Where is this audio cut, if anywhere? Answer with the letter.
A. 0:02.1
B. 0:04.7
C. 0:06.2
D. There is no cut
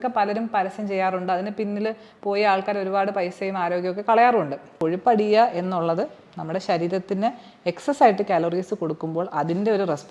B